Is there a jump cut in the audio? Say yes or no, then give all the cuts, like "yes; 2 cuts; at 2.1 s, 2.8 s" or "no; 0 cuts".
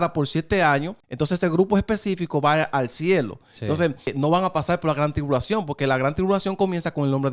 yes; 2 cuts; at 1.0 s, 4.1 s